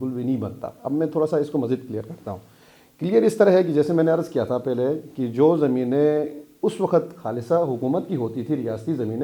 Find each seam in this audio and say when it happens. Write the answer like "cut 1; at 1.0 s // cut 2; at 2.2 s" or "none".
none